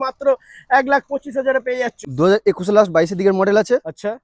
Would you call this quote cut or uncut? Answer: cut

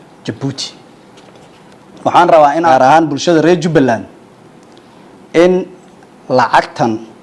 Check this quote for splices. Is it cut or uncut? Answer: cut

